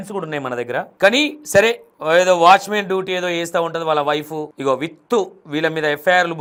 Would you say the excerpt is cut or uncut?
uncut